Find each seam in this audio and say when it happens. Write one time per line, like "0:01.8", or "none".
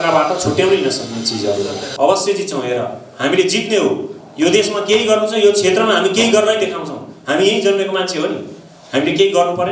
0:01.8